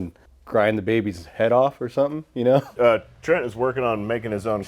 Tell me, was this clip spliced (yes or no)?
yes